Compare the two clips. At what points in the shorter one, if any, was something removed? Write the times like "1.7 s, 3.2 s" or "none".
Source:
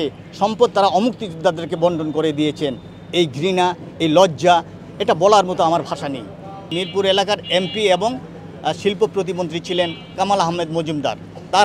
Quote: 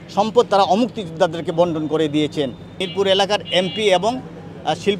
2.7 s